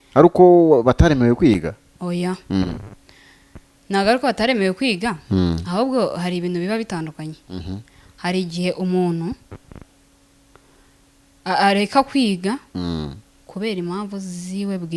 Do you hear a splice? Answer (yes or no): no